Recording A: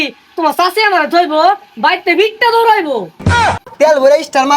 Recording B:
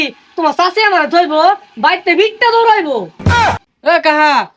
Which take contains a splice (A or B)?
A